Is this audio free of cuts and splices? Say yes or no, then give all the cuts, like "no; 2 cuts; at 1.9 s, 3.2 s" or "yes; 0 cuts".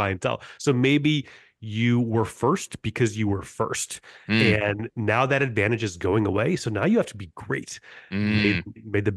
yes; 0 cuts